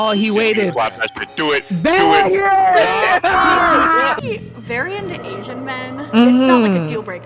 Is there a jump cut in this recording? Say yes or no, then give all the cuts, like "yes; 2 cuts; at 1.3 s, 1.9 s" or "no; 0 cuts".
yes; 1 cut; at 4.2 s